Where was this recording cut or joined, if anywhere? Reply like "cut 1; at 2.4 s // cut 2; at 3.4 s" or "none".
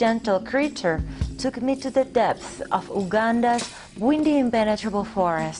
cut 1; at 3.0 s